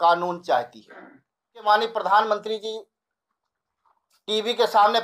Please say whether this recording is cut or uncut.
cut